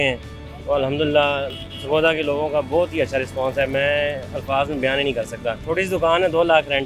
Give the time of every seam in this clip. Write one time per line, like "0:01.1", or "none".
0:05.6